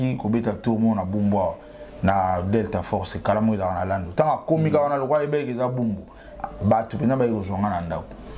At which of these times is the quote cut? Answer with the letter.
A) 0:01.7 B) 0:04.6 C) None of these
C